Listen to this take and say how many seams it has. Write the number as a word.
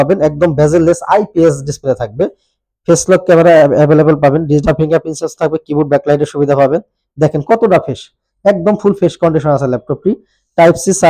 zero